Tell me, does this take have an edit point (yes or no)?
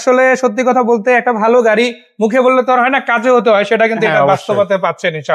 no